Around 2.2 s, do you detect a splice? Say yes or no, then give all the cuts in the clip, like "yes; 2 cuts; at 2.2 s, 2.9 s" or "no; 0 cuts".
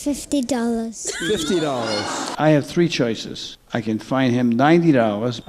yes; 1 cut; at 2.2 s